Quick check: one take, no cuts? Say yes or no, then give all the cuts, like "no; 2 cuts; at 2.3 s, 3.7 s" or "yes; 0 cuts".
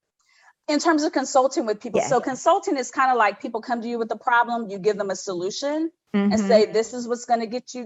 yes; 0 cuts